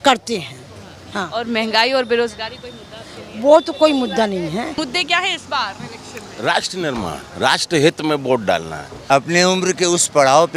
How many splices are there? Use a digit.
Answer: 2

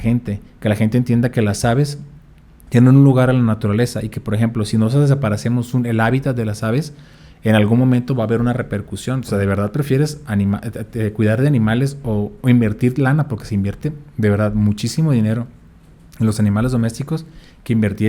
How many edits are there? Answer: 1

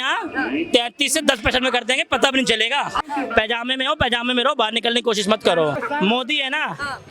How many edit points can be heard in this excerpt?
2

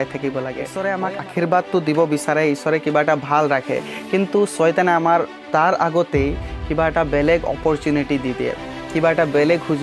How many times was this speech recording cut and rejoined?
1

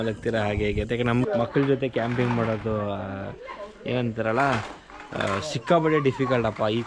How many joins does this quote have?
1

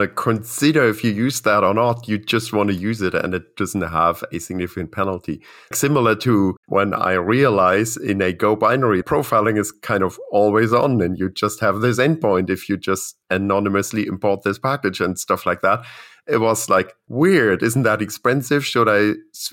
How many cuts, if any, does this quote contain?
5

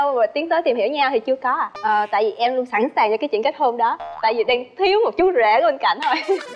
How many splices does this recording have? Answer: 1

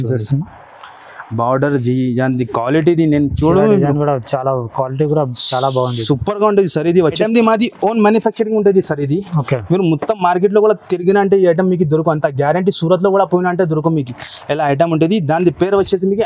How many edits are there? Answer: 1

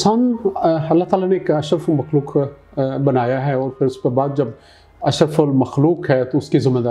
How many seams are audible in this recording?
0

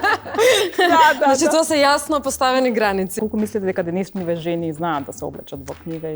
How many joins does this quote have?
1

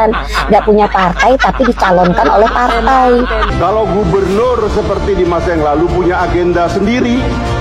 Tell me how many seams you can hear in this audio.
1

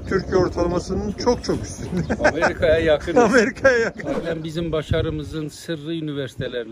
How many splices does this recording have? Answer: 1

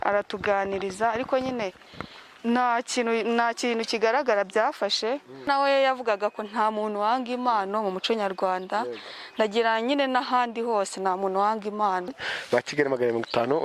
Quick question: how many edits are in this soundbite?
2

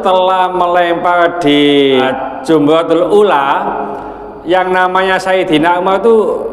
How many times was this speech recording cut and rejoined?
1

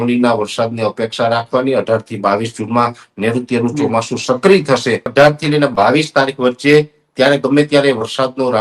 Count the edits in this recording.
1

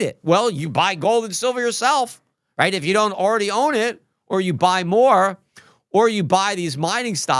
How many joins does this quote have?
0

